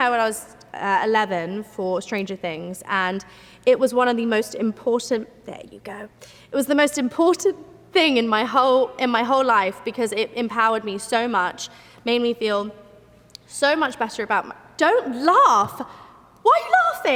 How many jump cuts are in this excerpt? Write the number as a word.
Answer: zero